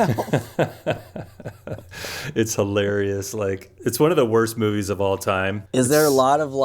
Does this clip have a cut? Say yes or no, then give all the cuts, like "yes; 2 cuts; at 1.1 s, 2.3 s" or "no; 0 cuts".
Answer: yes; 1 cut; at 3.9 s